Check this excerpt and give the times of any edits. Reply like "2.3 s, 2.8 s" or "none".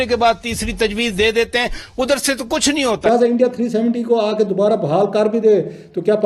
3.1 s